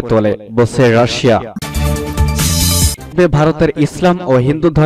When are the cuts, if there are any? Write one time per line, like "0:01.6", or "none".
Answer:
0:01.6

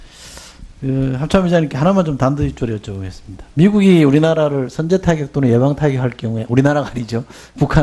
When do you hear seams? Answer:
0:03.8

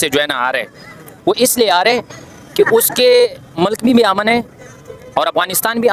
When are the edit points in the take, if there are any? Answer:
none

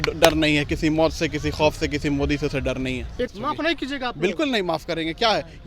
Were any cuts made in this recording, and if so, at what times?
0:03.3

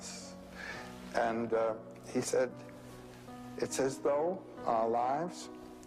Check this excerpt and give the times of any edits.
0:01.3

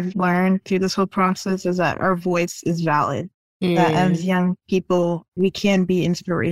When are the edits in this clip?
none

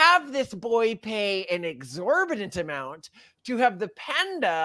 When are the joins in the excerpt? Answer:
none

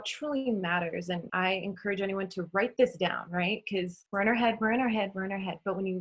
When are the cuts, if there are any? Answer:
0:01.3
0:04.0

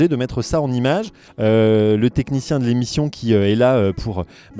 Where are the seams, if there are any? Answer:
0:01.2

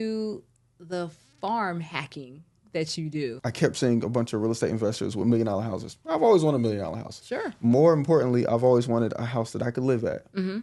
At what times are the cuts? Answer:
0:03.4

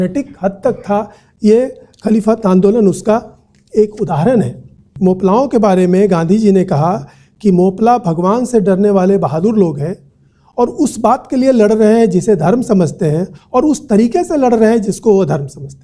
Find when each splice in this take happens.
0:04.8

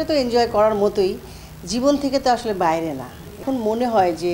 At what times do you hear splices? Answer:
0:03.4

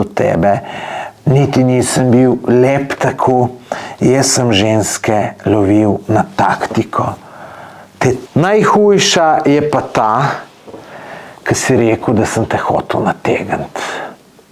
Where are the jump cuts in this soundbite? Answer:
0:08.2

